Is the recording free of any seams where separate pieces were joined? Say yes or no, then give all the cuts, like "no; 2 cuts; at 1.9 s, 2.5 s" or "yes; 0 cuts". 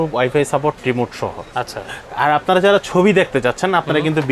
yes; 0 cuts